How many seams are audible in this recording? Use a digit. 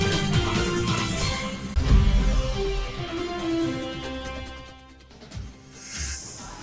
1